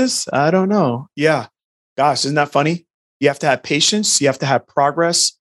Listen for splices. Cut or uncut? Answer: cut